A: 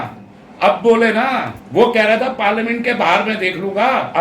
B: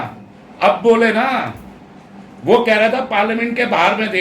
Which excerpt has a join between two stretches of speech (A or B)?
A